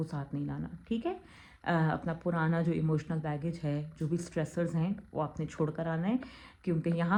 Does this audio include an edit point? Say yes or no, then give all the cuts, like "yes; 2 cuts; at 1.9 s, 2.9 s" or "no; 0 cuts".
no; 0 cuts